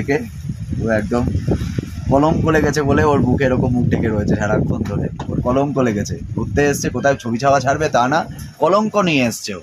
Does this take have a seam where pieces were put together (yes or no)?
no